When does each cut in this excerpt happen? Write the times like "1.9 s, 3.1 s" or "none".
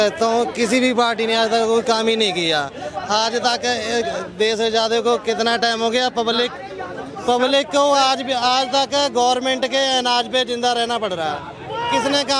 none